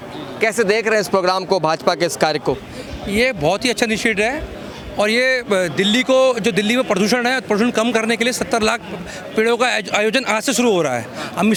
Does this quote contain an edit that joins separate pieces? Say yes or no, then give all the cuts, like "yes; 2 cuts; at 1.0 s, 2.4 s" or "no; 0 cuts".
no; 0 cuts